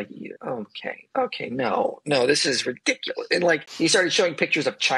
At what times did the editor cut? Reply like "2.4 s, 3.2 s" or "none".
3.7 s